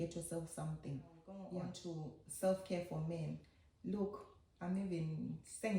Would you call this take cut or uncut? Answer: cut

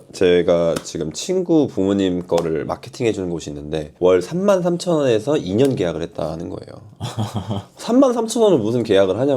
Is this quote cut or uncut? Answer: uncut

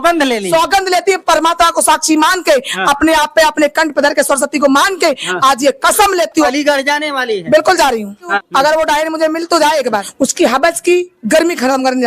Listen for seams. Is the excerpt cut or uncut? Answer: cut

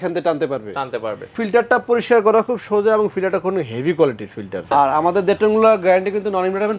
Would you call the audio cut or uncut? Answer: cut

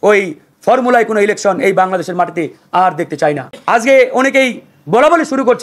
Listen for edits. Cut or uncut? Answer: cut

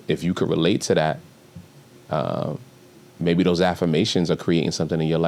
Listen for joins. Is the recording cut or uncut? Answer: uncut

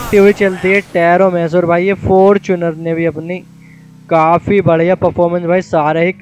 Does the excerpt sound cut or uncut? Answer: uncut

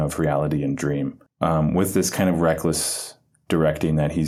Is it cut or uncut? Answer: uncut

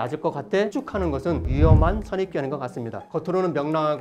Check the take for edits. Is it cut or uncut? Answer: cut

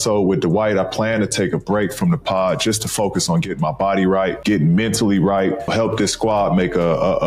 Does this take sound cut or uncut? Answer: uncut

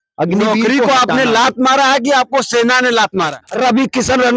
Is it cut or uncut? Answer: cut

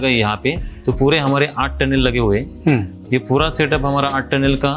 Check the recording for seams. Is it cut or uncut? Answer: uncut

